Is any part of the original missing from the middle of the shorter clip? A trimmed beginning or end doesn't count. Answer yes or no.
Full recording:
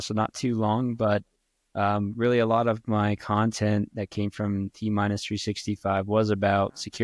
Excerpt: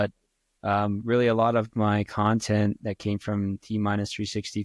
no